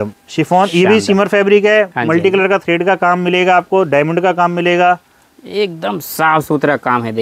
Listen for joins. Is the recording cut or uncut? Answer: uncut